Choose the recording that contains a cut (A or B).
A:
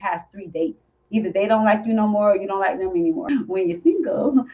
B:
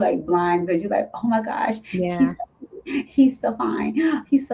A